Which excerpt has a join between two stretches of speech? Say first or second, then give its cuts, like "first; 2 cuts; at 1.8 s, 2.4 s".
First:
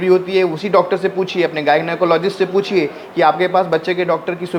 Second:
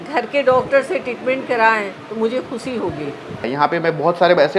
second; 1 cut; at 3.5 s